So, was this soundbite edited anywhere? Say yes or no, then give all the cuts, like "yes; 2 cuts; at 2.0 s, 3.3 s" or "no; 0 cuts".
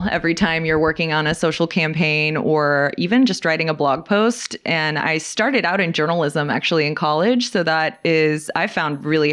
no; 0 cuts